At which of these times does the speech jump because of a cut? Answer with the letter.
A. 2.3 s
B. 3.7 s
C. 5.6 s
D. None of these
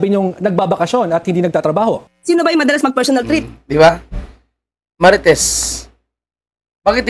D